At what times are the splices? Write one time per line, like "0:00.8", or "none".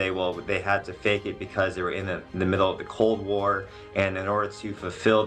none